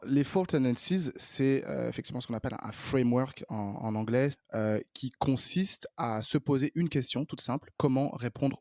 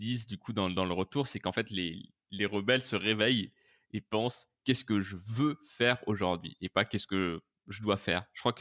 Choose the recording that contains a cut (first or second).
first